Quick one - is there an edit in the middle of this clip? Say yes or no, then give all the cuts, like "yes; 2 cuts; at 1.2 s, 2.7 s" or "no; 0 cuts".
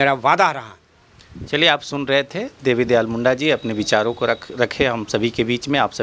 no; 0 cuts